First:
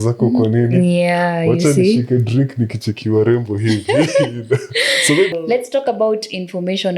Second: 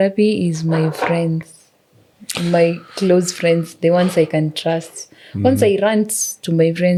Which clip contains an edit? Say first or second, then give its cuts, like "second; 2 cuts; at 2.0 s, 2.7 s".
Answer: first; 1 cut; at 5.3 s